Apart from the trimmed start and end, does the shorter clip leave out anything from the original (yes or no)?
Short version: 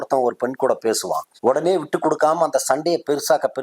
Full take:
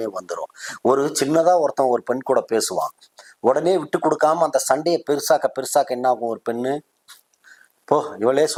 yes